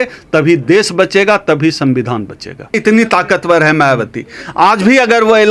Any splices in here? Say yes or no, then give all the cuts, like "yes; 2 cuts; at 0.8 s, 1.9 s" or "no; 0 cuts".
yes; 1 cut; at 2.7 s